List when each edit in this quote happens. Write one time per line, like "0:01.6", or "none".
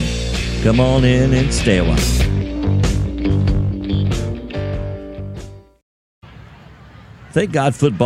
0:05.5